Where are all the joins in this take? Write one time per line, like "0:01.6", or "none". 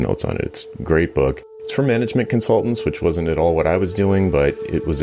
none